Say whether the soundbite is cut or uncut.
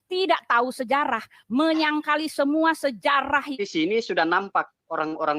cut